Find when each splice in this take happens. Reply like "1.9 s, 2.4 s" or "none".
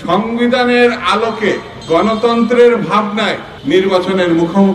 1.7 s, 3.5 s